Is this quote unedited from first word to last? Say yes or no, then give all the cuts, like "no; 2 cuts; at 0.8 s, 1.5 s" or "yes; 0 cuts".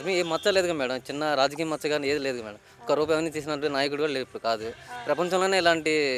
yes; 0 cuts